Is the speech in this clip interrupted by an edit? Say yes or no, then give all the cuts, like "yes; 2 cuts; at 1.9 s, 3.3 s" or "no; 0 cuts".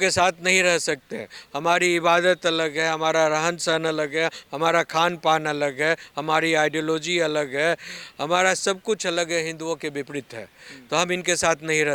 no; 0 cuts